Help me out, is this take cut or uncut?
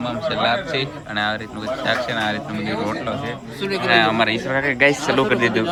uncut